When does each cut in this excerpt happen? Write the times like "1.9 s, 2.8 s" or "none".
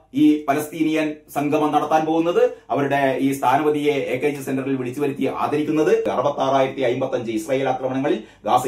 6.1 s